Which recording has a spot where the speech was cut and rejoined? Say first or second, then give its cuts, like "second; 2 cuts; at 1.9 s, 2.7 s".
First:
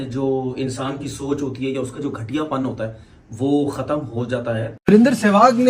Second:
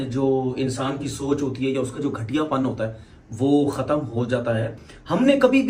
first; 1 cut; at 4.7 s